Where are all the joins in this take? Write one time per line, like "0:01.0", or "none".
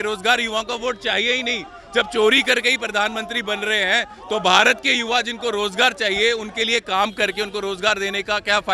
none